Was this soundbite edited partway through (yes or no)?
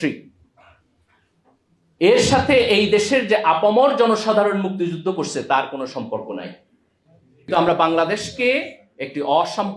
yes